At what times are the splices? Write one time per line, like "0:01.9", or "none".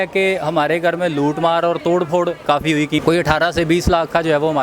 0:03.0